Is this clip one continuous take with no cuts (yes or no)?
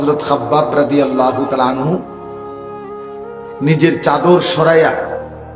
yes